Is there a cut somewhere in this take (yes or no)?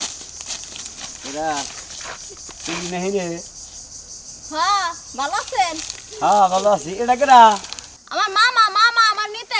no